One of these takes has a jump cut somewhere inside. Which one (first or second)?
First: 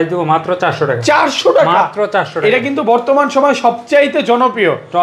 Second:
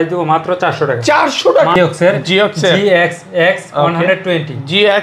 second